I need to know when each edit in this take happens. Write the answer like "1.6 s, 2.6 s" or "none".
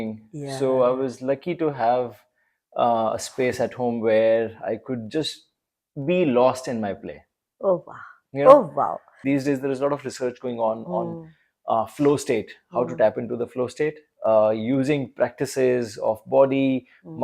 9.0 s